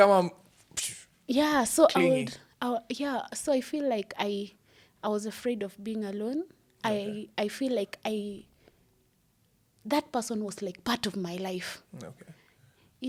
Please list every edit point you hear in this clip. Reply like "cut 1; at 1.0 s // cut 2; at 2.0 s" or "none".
none